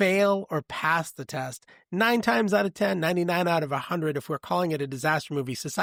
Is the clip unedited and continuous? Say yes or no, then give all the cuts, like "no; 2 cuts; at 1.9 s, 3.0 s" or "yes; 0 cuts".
yes; 0 cuts